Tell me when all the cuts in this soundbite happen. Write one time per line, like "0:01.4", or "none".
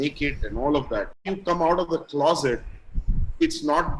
0:01.3